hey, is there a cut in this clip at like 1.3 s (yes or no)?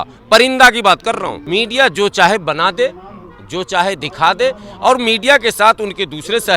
yes